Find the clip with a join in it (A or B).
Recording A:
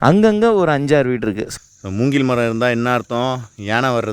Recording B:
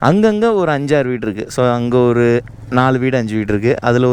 A